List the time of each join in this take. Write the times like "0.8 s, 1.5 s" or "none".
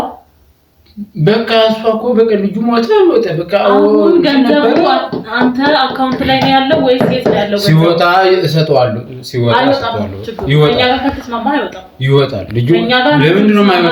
none